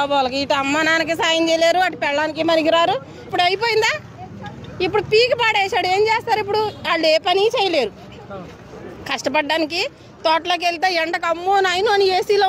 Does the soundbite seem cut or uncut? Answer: cut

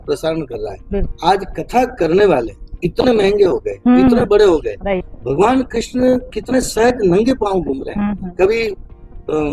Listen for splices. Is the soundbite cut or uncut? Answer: cut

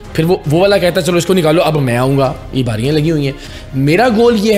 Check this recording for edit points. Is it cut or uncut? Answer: cut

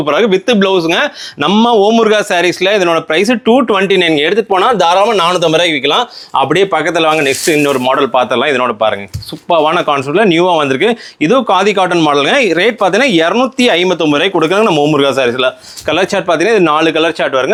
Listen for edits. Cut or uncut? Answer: uncut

